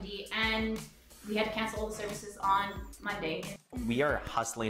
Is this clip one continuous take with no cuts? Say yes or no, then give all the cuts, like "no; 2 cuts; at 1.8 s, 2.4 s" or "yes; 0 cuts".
no; 1 cut; at 3.6 s